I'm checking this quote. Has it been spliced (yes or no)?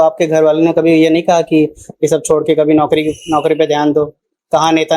no